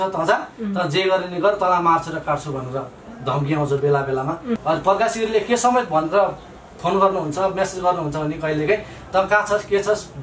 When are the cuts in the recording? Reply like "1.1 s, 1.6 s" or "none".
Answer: 4.6 s